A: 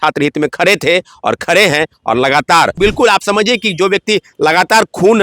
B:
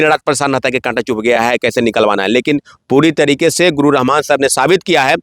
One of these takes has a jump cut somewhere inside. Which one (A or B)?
A